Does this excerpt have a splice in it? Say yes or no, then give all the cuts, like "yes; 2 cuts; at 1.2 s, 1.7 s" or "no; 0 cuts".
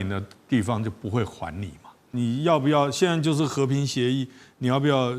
yes; 1 cut; at 2.1 s